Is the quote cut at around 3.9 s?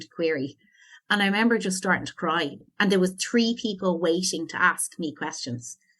no; 1 cut; at 2.6 s

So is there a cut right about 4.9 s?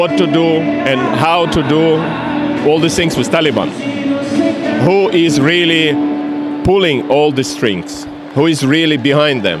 no; 0 cuts

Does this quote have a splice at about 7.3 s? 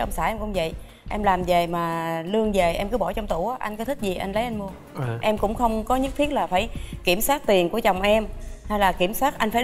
no; 0 cuts

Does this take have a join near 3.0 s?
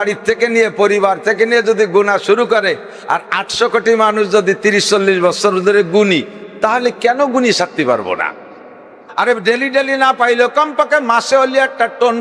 no; 1 cut; at 9.1 s

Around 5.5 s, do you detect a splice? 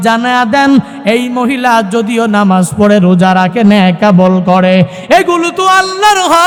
no; 0 cuts

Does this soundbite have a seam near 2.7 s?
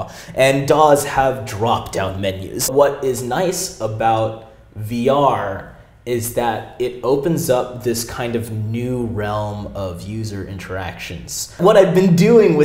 yes; 2 cuts; at 2.7 s, 11.6 s

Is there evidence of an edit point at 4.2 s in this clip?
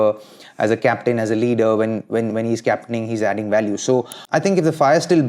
yes; 1 cut; at 4.2 s

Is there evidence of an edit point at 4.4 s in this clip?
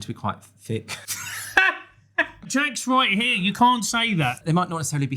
yes; 3 cuts; at 0.9 s, 2.5 s, 4.4 s

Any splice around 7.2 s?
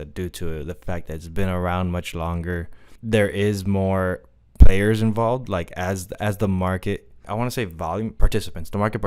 yes; 2 cuts; at 2.9 s, 7.2 s

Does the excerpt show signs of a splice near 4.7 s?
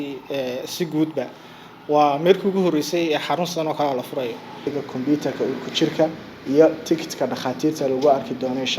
yes; 1 cut; at 4.7 s

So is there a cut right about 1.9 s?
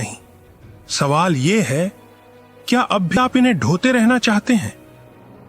no; 1 cut; at 3.2 s

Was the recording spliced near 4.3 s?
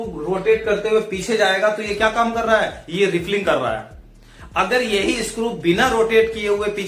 no; 0 cuts

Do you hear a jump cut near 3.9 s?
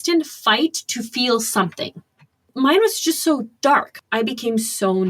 yes; 2 cuts; at 2.7 s, 3.9 s

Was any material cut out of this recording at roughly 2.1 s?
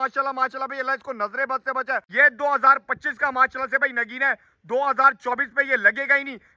yes; 1 cut; at 2.1 s

